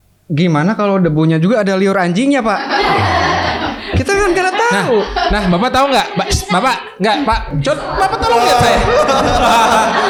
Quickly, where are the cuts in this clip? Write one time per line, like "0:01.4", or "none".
none